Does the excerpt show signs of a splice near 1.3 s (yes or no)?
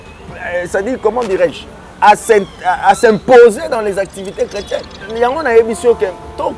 no